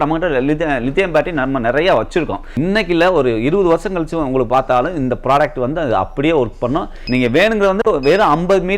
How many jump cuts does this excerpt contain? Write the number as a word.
two